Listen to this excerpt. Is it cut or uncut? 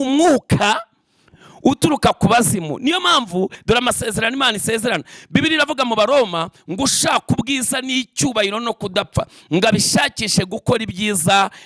cut